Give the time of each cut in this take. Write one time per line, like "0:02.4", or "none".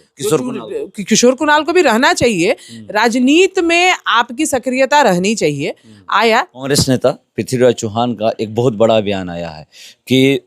0:06.6